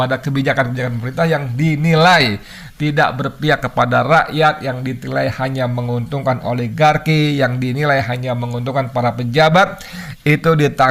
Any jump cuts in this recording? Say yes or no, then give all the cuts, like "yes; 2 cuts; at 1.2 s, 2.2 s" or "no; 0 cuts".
no; 0 cuts